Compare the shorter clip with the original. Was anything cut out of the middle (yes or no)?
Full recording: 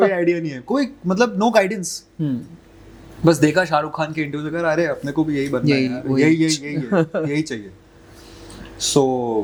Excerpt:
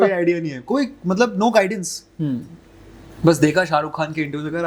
no